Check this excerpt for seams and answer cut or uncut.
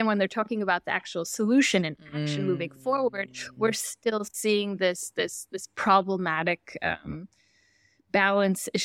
uncut